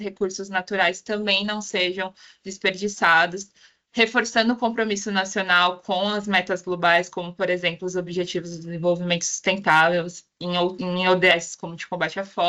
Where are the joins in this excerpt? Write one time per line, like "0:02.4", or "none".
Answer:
none

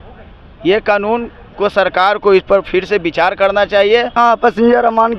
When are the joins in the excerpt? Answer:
0:04.1

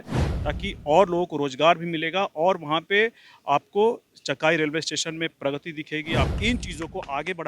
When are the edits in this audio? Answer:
0:06.3

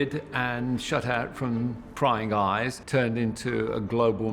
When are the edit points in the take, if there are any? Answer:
0:02.8

